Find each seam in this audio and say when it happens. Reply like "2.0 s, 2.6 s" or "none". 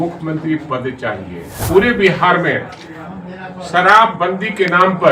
1.5 s